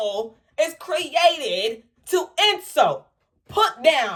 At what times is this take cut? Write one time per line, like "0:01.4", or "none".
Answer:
none